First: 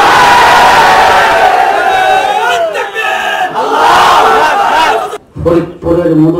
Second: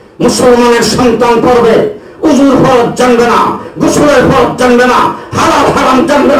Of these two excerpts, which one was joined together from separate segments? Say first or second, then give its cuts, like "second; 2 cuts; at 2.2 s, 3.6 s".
first; 1 cut; at 5.1 s